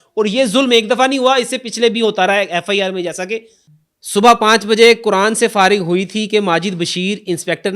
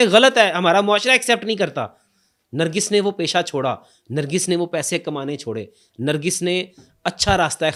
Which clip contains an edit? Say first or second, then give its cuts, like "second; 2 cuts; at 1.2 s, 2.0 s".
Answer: first; 1 cut; at 3.6 s